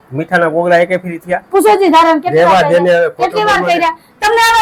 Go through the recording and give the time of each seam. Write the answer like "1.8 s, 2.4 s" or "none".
none